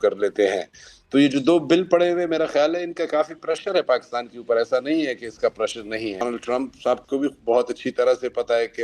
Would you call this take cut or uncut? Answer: cut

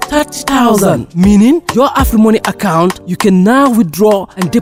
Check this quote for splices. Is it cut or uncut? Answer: uncut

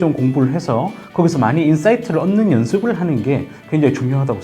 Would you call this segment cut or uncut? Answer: uncut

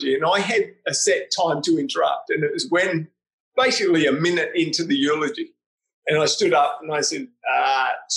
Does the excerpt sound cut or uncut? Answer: uncut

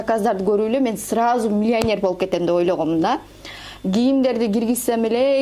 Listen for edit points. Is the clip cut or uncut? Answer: uncut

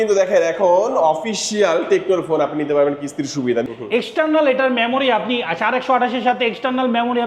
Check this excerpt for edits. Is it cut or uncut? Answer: cut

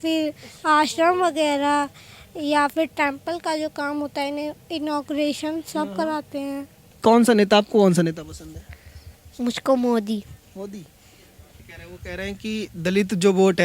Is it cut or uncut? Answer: cut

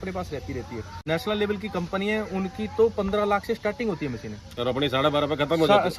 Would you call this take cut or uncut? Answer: cut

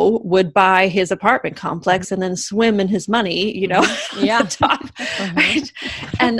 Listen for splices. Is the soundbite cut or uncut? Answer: uncut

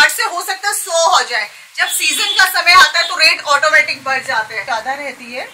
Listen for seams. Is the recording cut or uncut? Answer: cut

